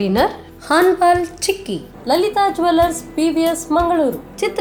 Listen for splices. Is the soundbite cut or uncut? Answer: uncut